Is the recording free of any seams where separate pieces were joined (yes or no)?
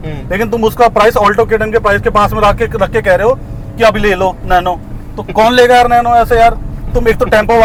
yes